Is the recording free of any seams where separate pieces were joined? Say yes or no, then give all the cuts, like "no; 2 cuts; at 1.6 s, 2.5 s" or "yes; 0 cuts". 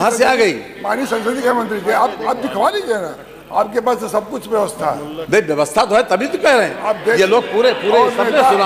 yes; 0 cuts